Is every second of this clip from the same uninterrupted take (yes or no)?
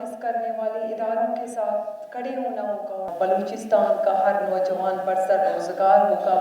no